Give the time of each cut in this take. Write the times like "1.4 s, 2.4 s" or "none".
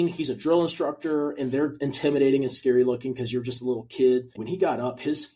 4.4 s